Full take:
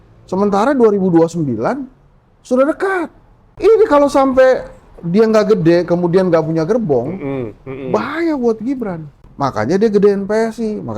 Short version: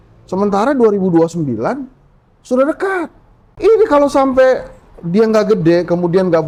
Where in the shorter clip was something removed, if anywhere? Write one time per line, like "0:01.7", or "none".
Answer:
none